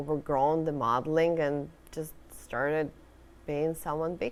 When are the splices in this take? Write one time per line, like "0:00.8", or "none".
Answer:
none